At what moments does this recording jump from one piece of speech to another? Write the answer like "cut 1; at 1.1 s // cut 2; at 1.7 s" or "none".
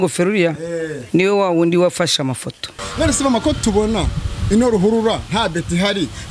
cut 1; at 2.7 s